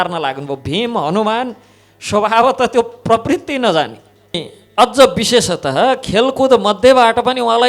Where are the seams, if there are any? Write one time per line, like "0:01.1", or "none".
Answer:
0:04.5